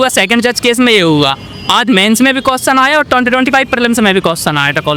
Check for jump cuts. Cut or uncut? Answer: uncut